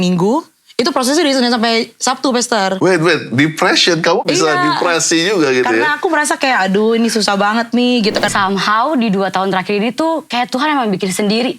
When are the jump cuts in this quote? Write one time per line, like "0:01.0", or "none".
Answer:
0:08.3

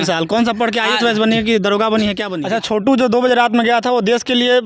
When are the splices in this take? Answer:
0:02.3

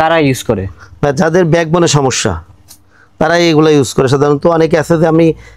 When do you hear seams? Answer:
none

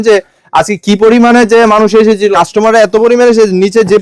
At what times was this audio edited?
0:02.3

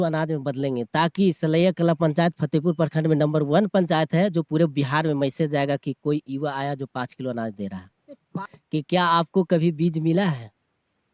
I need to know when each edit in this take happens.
0:08.4

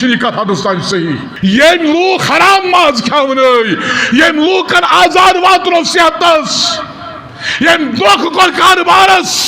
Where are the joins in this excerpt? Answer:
0:01.3

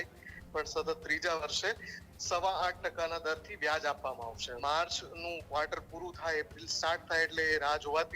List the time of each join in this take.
0:04.5

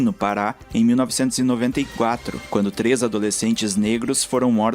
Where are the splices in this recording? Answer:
0:02.3

